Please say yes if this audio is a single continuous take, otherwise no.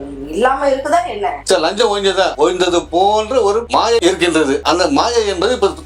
no